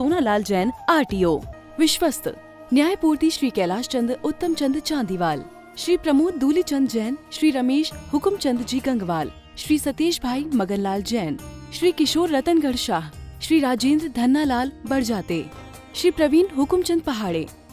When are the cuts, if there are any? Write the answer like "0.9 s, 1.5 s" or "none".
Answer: 1.5 s